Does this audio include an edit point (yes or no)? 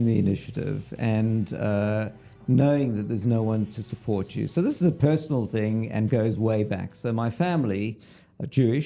no